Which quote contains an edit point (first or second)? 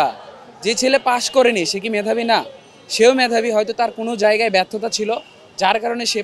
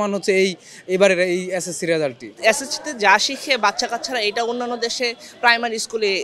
second